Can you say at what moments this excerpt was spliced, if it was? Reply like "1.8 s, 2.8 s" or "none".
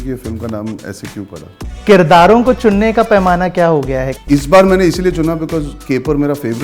1.7 s, 4.1 s